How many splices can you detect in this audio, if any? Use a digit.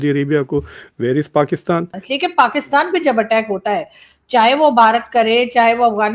1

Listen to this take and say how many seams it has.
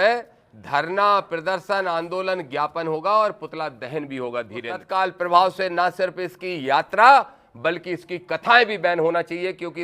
1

